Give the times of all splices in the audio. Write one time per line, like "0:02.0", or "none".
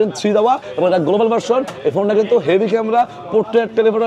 none